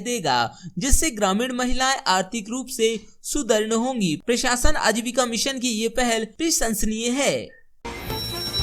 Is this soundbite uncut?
no; 1 cut; at 7.6 s

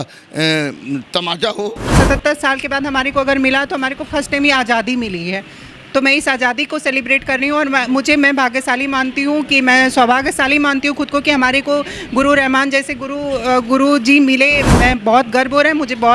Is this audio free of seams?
no; 2 cuts; at 1.9 s, 14.7 s

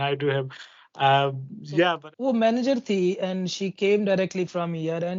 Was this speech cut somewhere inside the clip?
yes; 1 cut; at 1.9 s

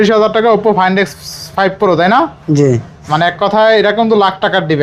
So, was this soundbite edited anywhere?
no; 0 cuts

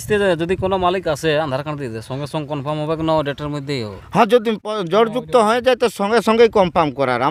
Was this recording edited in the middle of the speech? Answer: no; 0 cuts

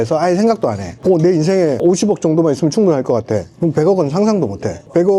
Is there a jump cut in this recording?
no; 0 cuts

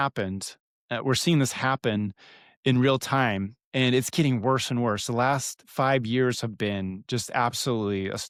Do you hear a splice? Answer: no; 0 cuts

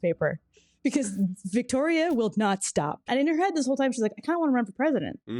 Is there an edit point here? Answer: yes; 1 cut; at 3.1 s

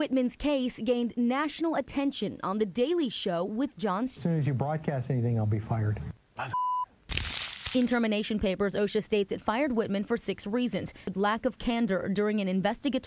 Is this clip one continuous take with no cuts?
no; 3 cuts; at 4.2 s, 6.2 s, 11.1 s

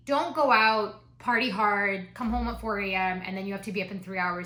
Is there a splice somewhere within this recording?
no; 0 cuts

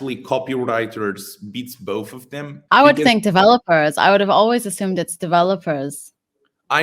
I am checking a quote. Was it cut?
yes; 1 cut; at 2.5 s

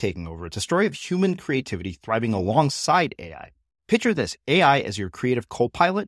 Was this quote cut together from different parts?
no; 0 cuts

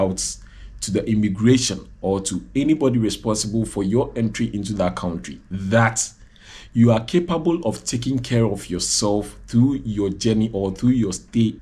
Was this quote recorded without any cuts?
yes; 0 cuts

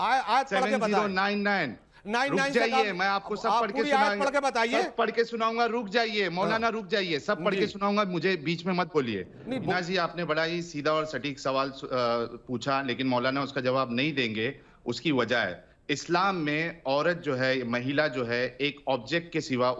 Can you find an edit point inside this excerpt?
yes; 1 cut; at 9.7 s

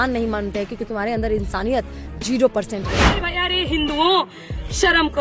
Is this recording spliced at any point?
yes; 1 cut; at 3.2 s

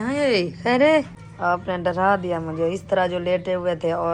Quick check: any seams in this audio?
yes; 1 cut; at 1.2 s

